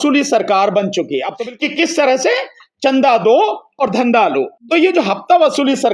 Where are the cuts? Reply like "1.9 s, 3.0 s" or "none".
1.4 s, 4.6 s